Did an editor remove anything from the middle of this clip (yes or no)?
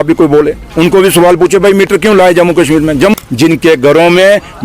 yes